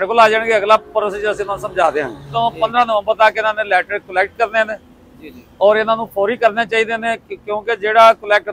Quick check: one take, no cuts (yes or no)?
no